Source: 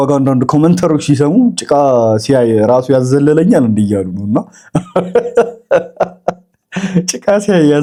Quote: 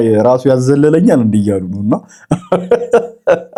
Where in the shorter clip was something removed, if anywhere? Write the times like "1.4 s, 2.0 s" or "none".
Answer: none